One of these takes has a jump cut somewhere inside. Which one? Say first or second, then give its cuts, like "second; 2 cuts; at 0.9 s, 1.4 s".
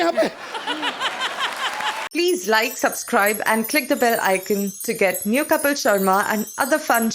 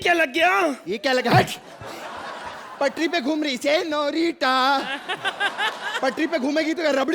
first; 1 cut; at 2.0 s